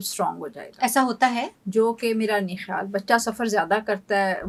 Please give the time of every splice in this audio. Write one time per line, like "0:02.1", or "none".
none